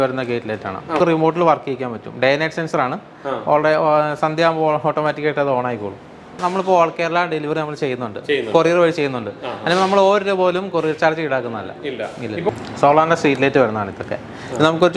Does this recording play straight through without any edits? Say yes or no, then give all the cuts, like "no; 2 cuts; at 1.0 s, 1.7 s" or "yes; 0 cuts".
no; 3 cuts; at 1.0 s, 6.3 s, 12.5 s